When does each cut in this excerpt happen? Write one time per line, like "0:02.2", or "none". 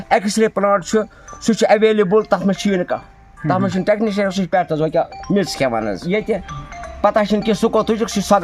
0:06.0